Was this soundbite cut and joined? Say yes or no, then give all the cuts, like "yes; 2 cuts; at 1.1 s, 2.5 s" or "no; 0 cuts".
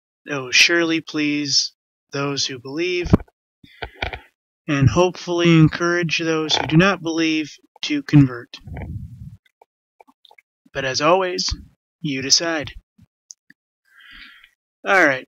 no; 0 cuts